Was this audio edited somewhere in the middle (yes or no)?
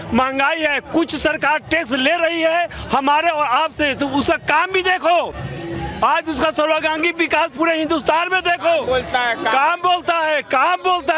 no